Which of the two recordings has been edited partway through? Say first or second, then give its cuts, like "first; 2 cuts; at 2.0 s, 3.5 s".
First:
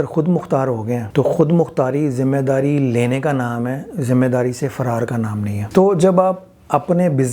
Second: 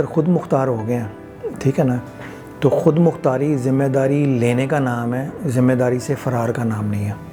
first; 2 cuts; at 1.0 s, 5.6 s